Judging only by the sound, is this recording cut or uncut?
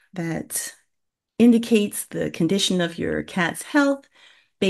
uncut